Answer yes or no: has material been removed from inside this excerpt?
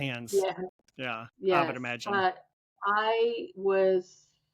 no